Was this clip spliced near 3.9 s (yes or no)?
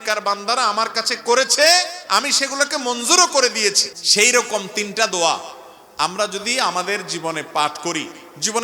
yes